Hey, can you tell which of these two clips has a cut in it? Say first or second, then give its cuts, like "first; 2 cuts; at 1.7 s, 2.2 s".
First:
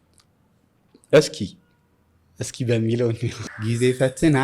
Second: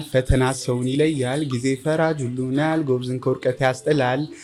first; 1 cut; at 3.5 s